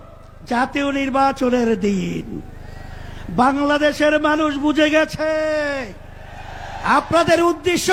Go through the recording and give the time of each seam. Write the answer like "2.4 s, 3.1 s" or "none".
none